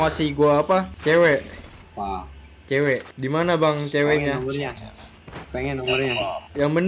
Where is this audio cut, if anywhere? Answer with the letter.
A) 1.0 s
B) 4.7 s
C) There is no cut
C